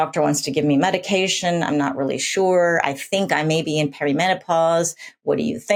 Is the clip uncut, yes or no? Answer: yes